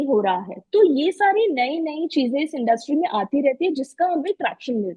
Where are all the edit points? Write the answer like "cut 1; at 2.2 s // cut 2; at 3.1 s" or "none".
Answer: none